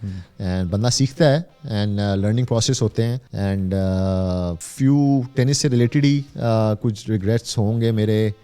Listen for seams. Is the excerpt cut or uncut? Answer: cut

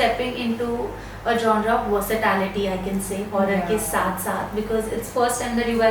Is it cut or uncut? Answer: uncut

